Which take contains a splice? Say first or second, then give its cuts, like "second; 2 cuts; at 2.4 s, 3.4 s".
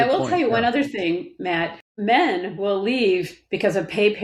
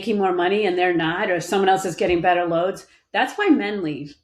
first; 1 cut; at 1.8 s